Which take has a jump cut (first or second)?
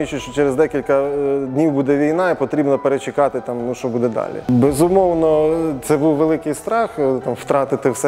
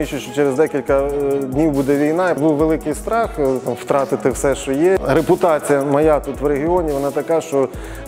second